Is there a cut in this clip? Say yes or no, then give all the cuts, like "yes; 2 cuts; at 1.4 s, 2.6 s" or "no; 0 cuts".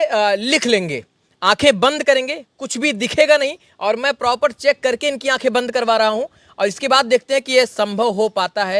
no; 0 cuts